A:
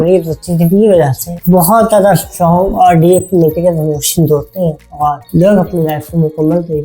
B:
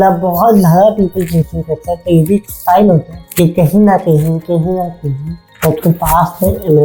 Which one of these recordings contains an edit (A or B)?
A